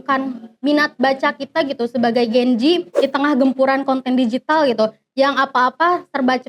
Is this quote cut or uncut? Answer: cut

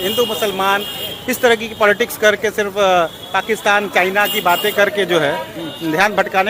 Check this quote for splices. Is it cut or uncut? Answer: uncut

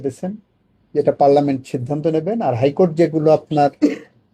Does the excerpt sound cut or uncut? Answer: uncut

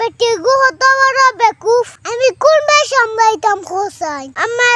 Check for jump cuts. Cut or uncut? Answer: uncut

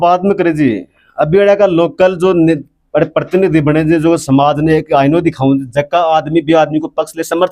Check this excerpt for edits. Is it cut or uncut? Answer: uncut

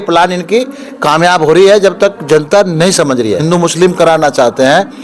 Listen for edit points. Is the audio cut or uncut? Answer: cut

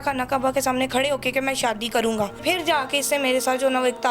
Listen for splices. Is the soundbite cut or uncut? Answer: cut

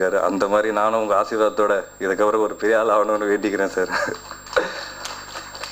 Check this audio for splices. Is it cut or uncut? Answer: uncut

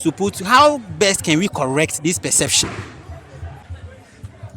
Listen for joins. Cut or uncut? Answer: cut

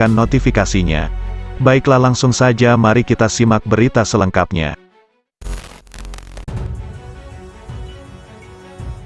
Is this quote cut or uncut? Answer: cut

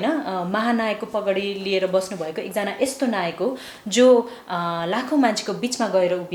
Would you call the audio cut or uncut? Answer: uncut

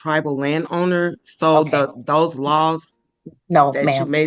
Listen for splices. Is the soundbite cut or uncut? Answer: uncut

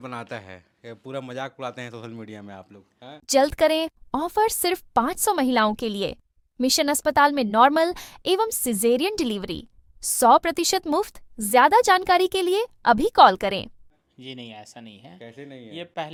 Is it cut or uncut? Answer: uncut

